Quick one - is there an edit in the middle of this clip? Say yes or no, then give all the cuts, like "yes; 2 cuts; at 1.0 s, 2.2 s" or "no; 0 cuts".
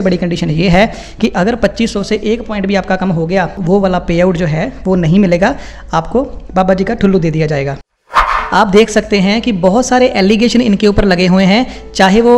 yes; 2 cuts; at 3.6 s, 8.1 s